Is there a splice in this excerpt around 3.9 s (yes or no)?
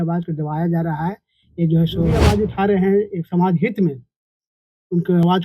no